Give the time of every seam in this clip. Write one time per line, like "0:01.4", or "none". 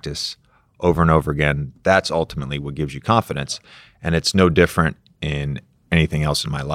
0:05.8